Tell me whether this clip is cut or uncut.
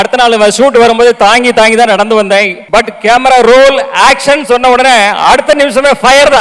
cut